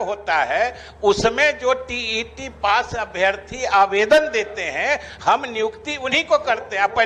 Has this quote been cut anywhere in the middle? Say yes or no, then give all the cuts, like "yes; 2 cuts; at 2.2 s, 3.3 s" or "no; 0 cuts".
no; 0 cuts